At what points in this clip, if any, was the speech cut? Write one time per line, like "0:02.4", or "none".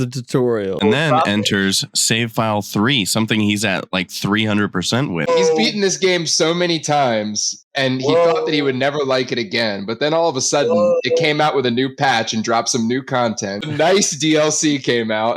0:00.8
0:05.3
0:13.7